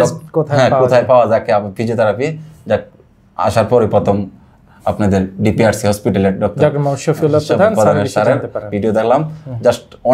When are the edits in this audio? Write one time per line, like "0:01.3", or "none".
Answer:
none